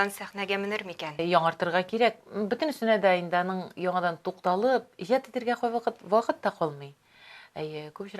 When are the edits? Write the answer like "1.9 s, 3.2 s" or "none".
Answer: 1.2 s